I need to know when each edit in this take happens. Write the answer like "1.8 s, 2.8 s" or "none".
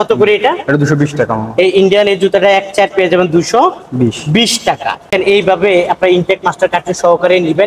5.1 s